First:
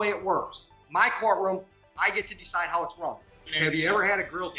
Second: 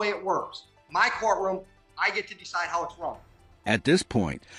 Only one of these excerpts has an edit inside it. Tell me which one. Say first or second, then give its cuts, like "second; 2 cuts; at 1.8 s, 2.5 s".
first; 1 cut; at 3.5 s